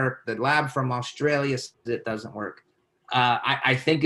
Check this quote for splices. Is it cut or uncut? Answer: cut